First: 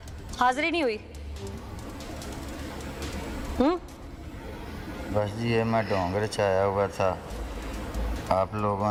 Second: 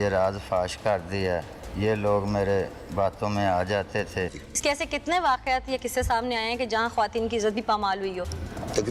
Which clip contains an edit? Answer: second; 1 cut; at 4.3 s

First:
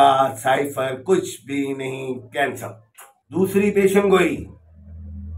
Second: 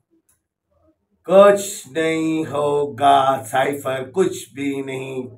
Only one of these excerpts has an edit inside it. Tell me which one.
first; 1 cut; at 3.4 s

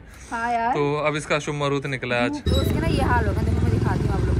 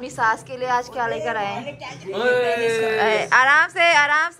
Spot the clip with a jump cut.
first; 1 cut; at 2.4 s

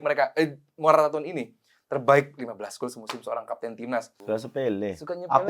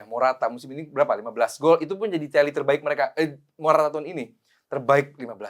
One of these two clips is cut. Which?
first; 1 cut; at 4.1 s

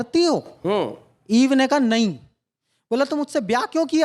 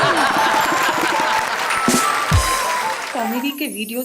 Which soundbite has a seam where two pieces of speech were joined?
second; 1 cut; at 3.0 s

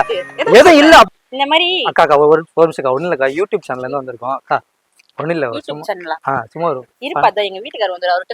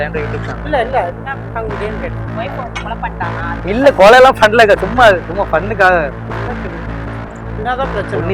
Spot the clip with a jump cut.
first; 1 cut; at 1.1 s

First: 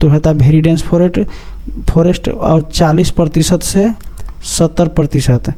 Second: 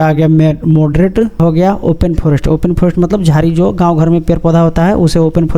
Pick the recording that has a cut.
second; 1 cut; at 1.3 s

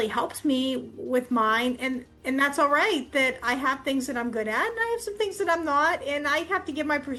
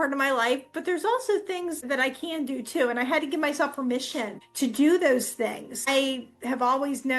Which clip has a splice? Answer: second; 3 cuts; at 1.8 s, 4.4 s, 5.9 s

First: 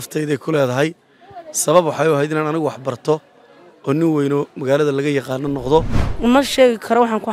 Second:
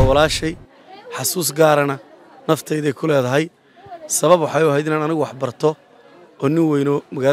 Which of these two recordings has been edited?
first; 1 cut; at 6.0 s

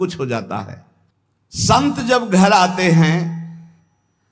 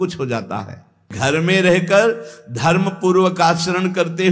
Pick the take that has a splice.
second; 1 cut; at 1.1 s

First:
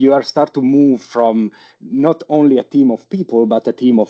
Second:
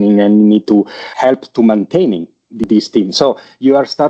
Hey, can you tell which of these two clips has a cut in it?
second; 2 cuts; at 1.0 s, 2.6 s

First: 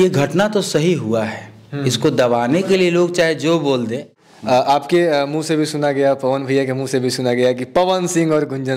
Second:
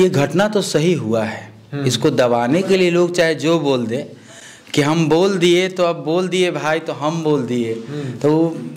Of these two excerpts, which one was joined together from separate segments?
first; 1 cut; at 4.5 s

